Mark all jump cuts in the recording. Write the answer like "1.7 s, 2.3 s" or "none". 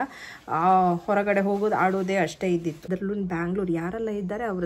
2.9 s